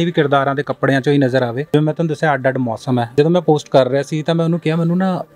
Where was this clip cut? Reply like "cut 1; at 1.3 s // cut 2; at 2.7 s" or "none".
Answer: cut 1; at 1.7 s // cut 2; at 3.1 s